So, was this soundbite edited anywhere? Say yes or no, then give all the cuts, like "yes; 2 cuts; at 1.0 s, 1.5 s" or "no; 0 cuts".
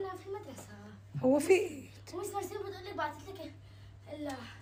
no; 0 cuts